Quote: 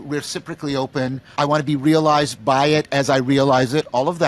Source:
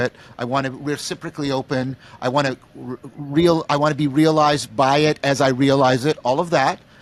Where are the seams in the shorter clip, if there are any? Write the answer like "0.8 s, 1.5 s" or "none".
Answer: 1.3 s

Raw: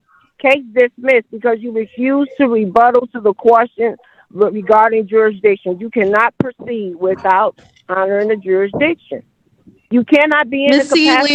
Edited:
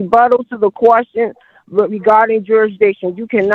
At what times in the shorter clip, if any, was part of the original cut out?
none

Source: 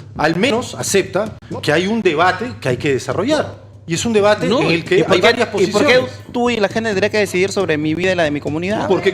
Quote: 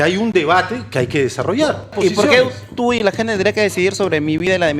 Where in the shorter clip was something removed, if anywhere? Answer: 1.9 s

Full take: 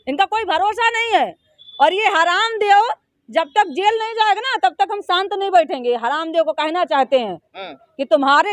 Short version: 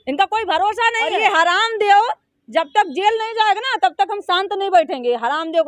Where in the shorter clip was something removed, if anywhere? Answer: 1.1 s

